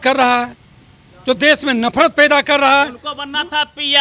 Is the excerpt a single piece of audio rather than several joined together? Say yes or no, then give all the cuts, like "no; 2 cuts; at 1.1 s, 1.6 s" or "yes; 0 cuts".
yes; 0 cuts